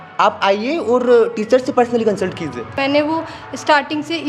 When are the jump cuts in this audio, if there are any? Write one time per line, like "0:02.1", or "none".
0:02.8